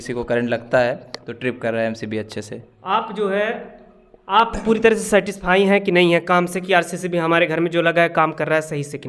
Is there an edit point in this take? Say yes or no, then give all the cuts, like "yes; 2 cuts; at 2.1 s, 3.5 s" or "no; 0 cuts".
no; 0 cuts